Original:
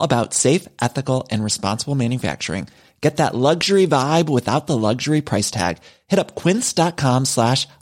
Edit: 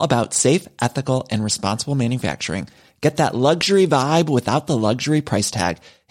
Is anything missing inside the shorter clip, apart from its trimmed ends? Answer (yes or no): no